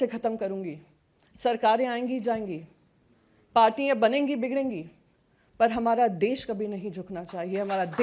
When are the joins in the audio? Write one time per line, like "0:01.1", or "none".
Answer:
none